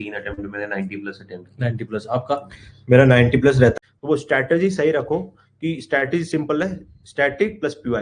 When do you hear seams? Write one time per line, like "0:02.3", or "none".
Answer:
0:03.7